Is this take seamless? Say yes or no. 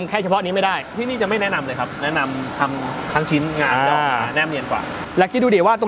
no